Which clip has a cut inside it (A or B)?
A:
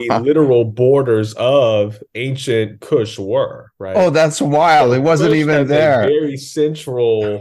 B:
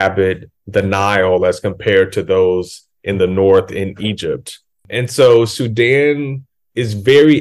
B